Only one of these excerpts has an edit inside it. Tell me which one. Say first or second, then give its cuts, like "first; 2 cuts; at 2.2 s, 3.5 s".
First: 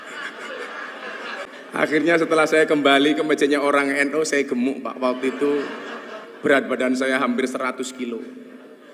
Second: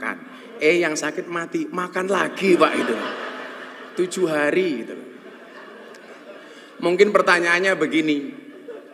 first; 1 cut; at 1.5 s